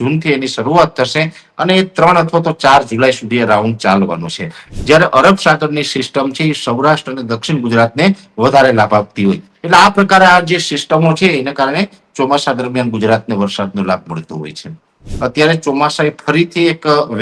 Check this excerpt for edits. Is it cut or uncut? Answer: cut